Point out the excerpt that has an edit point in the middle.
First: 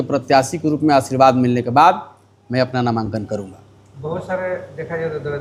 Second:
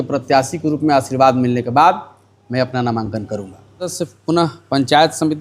second; 1 cut; at 3.9 s

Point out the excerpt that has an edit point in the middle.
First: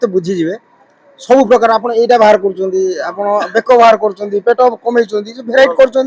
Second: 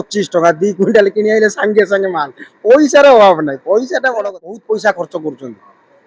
second; 1 cut; at 4.5 s

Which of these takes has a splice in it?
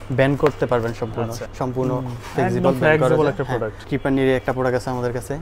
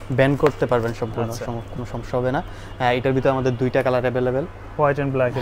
first; 2 cuts; at 1.4 s, 3.8 s

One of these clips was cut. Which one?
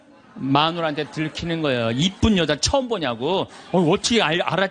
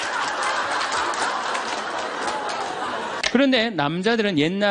second; 1 cut; at 3.2 s

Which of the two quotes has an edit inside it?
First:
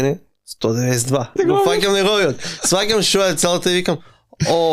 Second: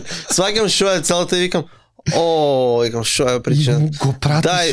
first; 1 cut; at 1.3 s

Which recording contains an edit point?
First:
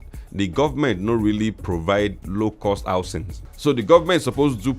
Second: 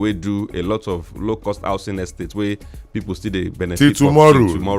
first; 1 cut; at 3.5 s

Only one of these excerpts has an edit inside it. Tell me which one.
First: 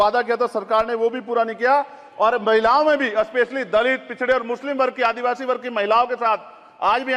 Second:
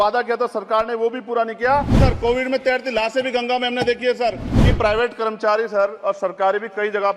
second; 2 cuts; at 2.0 s, 4.5 s

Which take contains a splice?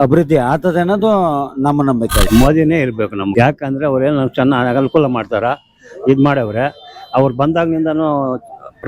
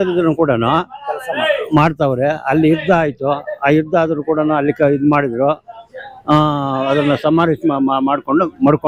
first; 2 cuts; at 2.2 s, 3.3 s

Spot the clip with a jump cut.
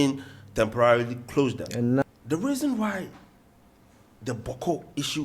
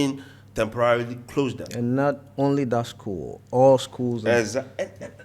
first; 1 cut; at 2.0 s

